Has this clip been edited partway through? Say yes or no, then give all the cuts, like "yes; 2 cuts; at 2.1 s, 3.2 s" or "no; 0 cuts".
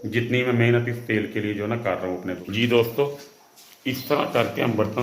yes; 1 cut; at 2.4 s